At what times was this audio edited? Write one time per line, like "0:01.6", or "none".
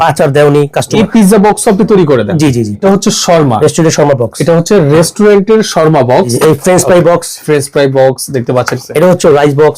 0:00.9
0:02.8
0:06.3
0:08.8